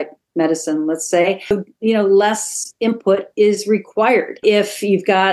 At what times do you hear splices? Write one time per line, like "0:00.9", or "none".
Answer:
0:01.5
0:04.4